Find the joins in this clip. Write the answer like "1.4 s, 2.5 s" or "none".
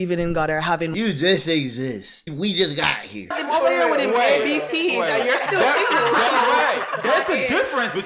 2.3 s, 3.4 s